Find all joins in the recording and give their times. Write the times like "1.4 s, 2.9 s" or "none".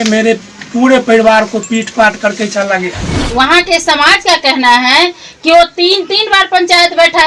3.1 s